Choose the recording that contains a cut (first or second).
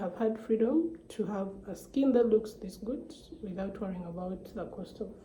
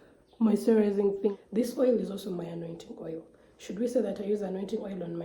second